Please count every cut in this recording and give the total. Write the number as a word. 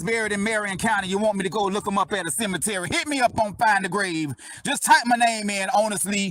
zero